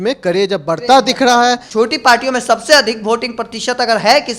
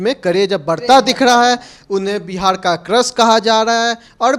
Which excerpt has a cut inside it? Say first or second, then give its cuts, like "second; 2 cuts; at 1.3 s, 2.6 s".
first; 1 cut; at 1.6 s